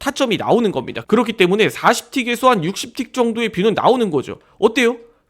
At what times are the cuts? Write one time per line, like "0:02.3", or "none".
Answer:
0:04.4